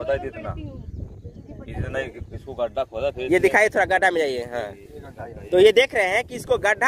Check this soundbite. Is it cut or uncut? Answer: uncut